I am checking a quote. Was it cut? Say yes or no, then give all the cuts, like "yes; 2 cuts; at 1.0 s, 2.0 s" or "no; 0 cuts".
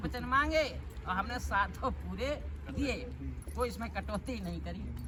no; 0 cuts